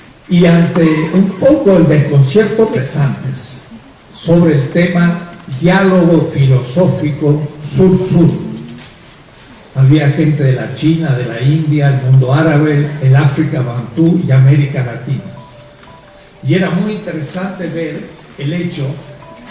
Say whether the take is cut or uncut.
uncut